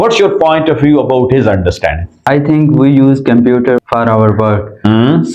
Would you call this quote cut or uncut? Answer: cut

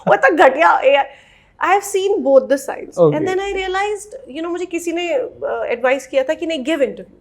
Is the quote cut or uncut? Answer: uncut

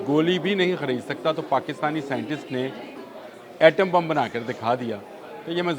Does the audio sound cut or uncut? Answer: uncut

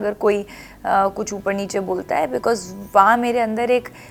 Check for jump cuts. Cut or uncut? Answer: uncut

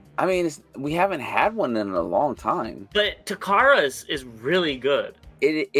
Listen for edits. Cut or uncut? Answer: uncut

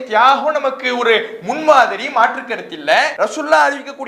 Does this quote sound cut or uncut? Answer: cut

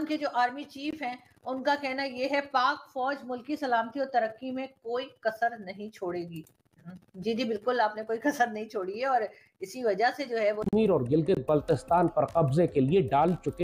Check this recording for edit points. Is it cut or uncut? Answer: cut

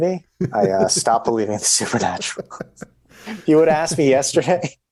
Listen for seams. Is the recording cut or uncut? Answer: uncut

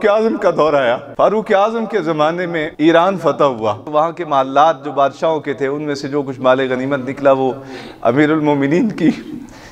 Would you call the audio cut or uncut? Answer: cut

